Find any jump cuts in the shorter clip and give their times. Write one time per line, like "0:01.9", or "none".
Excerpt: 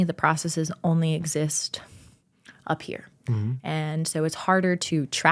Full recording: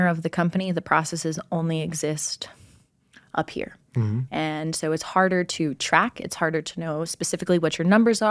none

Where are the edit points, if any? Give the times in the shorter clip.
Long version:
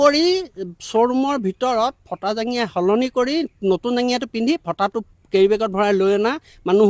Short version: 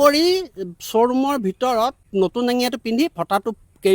0:02.0

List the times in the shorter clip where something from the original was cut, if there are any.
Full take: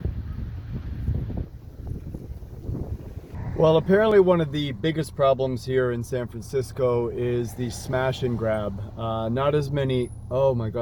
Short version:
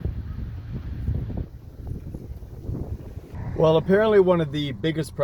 none

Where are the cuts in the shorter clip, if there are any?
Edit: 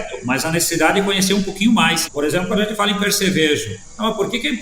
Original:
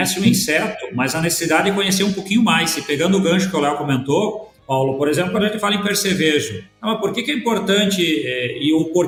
0:02.1

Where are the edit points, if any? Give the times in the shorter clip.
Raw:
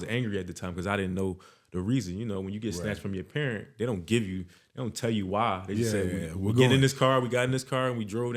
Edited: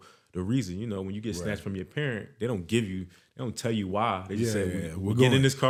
none

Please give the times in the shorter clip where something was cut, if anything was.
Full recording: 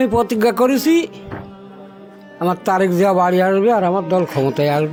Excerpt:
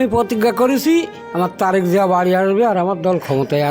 0:01.2

